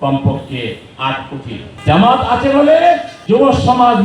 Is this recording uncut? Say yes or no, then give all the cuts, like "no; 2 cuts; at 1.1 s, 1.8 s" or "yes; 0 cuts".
no; 2 cuts; at 1.7 s, 3.1 s